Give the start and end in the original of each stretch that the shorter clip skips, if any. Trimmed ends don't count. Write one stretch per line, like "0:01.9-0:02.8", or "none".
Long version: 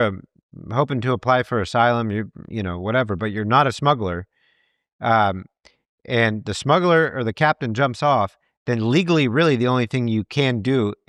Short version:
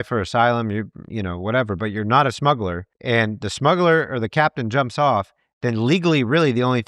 0:04.3-0:05.9

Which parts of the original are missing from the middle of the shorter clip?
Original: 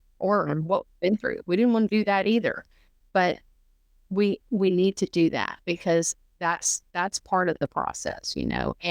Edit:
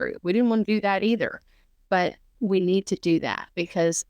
0:03.6-0:04.4

